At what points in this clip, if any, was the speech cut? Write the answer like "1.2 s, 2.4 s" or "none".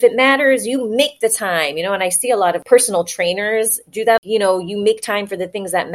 2.6 s, 4.2 s